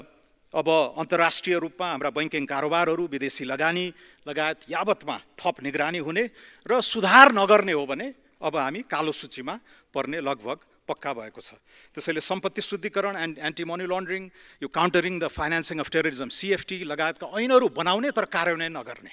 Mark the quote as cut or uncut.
uncut